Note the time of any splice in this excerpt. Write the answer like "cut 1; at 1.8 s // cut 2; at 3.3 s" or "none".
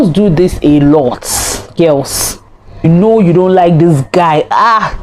cut 1; at 2.8 s